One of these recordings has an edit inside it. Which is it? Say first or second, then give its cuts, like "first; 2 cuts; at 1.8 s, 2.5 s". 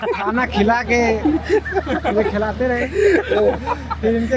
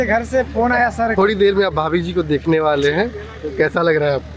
second; 1 cut; at 1.1 s